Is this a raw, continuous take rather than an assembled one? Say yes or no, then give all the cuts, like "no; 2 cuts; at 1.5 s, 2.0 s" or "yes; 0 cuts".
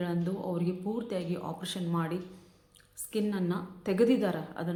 yes; 0 cuts